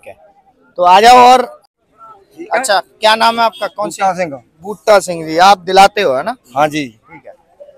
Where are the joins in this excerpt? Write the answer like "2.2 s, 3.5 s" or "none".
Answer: 1.6 s